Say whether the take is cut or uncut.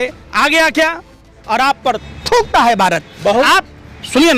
cut